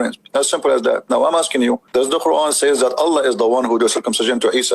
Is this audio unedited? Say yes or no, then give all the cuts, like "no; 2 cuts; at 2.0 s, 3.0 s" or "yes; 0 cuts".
no; 1 cut; at 1.8 s